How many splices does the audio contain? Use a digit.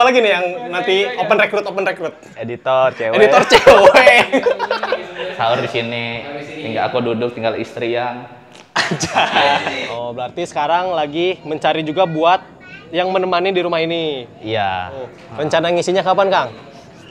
3